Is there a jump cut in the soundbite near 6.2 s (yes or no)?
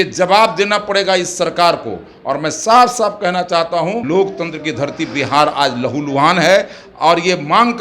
no